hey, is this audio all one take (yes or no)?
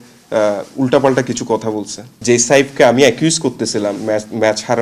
no